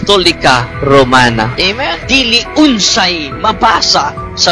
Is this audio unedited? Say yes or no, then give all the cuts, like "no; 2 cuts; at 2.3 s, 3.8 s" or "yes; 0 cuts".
no; 1 cut; at 1.7 s